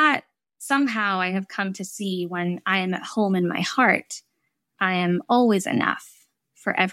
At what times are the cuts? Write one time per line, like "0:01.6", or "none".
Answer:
none